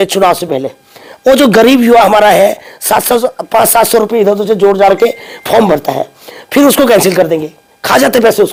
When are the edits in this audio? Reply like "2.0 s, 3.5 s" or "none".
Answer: none

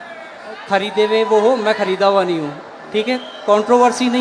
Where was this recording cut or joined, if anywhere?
none

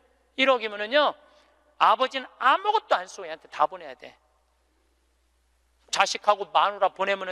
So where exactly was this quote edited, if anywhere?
5.8 s

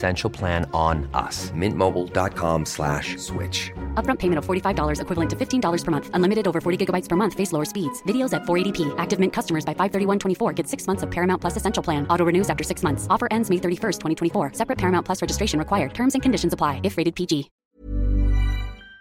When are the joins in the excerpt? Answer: 17.6 s

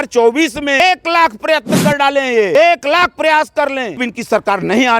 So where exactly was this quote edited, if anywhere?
0.8 s, 2.5 s, 4.0 s

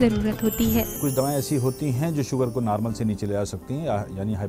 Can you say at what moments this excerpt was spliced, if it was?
1.0 s

